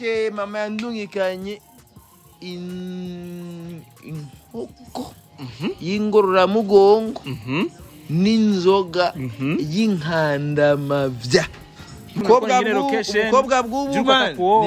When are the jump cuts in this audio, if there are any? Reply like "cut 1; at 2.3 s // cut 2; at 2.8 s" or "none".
cut 1; at 12.2 s